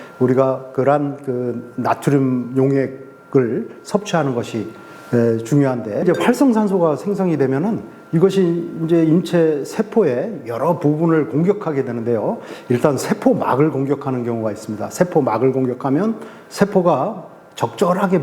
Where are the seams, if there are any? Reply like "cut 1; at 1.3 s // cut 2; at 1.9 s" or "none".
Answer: cut 1; at 6.0 s